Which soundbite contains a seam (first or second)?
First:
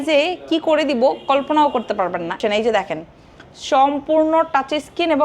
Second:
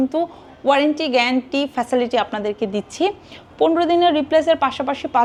first